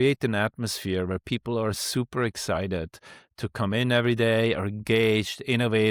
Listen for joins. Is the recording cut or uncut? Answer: uncut